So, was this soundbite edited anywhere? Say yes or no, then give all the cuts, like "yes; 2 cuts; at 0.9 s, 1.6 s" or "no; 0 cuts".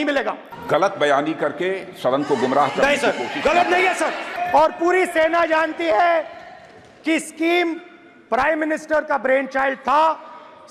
no; 0 cuts